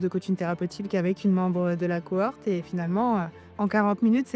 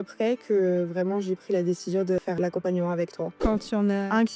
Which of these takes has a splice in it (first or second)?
second